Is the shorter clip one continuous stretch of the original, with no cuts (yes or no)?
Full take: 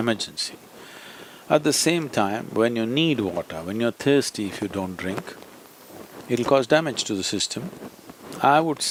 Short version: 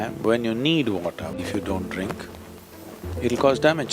no